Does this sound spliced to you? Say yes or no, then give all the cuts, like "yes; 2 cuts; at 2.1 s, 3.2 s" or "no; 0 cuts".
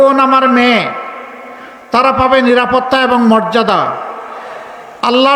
no; 0 cuts